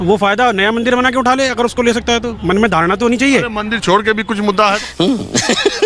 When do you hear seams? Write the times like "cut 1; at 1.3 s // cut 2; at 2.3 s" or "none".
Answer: none